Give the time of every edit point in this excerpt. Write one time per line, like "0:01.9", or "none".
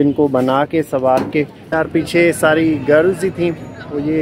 0:01.8